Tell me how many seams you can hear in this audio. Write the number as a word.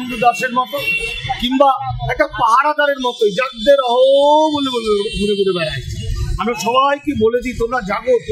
zero